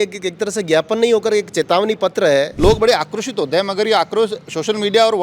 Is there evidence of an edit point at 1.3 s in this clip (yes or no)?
no